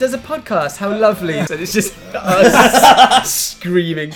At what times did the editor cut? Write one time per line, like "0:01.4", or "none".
0:01.5